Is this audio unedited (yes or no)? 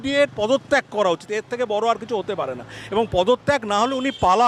yes